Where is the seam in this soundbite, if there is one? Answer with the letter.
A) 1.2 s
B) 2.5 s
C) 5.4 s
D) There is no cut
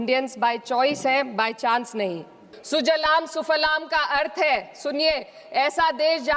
B